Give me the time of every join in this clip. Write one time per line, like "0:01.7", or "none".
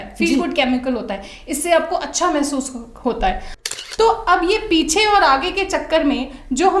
0:03.8

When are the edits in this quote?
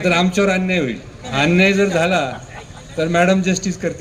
0:01.2

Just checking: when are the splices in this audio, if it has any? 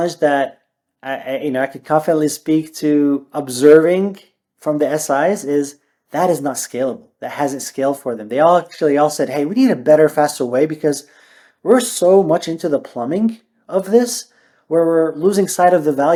none

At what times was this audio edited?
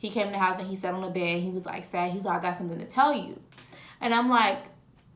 none

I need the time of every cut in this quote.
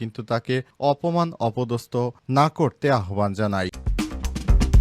0:03.8

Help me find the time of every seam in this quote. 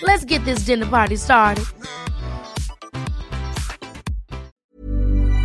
0:04.5

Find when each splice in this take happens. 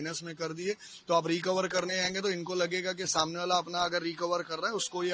none

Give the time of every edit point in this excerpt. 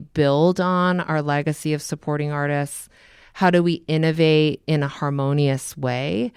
none

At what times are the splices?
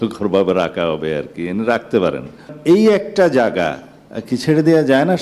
0:02.5

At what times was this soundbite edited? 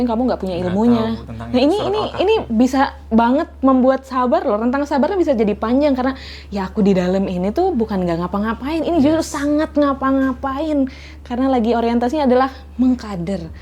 none

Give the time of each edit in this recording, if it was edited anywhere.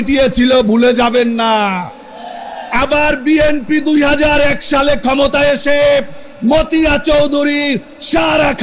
none

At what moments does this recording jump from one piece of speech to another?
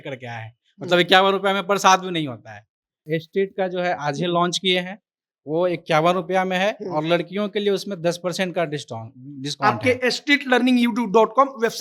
0:03.0

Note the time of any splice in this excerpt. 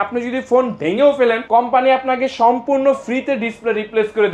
0:01.4

